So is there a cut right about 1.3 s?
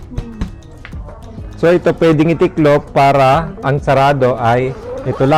yes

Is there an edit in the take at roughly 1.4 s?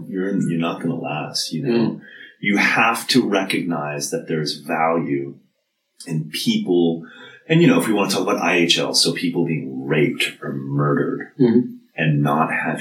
no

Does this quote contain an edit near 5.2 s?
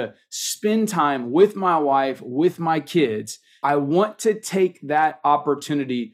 no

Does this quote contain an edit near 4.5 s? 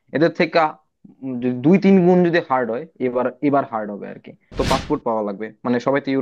yes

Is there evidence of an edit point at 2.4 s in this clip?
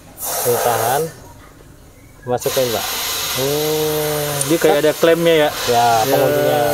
no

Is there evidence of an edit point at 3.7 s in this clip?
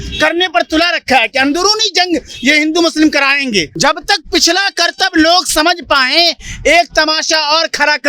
yes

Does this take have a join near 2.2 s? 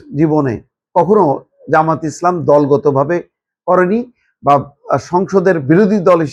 no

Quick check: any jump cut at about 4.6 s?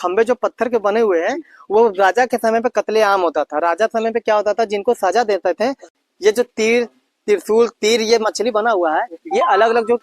no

